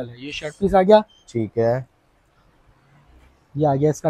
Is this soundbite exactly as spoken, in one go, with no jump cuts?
yes; 0 cuts

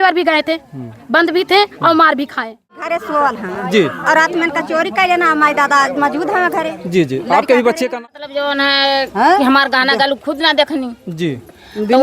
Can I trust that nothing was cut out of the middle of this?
no; 2 cuts; at 3.0 s, 7.9 s

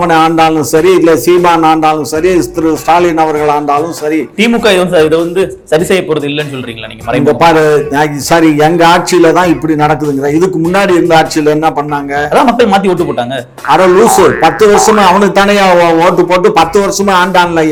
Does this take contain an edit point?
no; 0 cuts

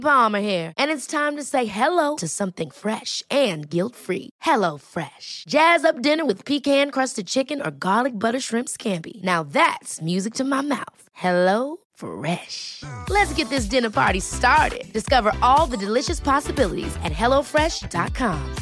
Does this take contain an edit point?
no; 0 cuts

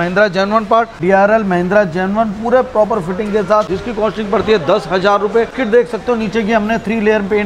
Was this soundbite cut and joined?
yes; 3 cuts; at 1.0 s, 3.7 s, 5.6 s

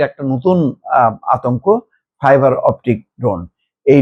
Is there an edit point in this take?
no; 0 cuts

